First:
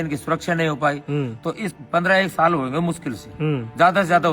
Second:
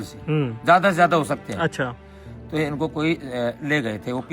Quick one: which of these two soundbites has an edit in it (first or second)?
first